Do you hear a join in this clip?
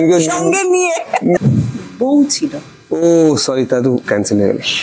yes; 1 cut; at 1.4 s

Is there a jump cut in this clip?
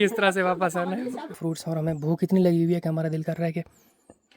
yes; 1 cut; at 1.4 s

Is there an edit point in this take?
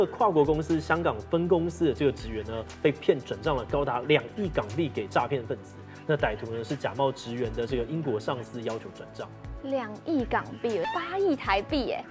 yes; 1 cut; at 10.8 s

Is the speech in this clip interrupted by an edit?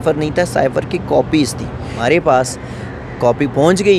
yes; 1 cut; at 1.9 s

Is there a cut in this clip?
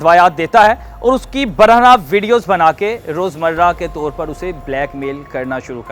no; 0 cuts

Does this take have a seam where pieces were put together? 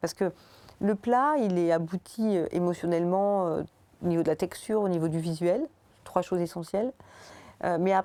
no; 0 cuts

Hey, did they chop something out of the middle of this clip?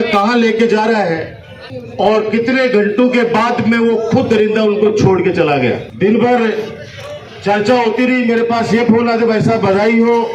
no; 0 cuts

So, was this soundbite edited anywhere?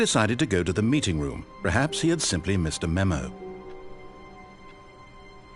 yes; 1 cut; at 3.2 s

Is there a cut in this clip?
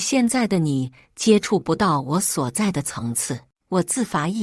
yes; 1 cut; at 3.5 s

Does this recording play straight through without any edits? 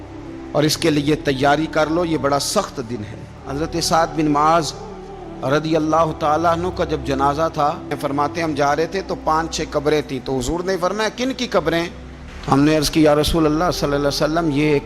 no; 2 cuts; at 3.4 s, 8.0 s

